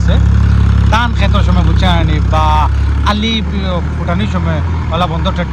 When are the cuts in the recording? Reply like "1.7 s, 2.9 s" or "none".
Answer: none